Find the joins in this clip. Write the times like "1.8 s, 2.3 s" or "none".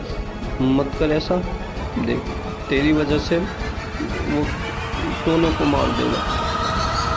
6.2 s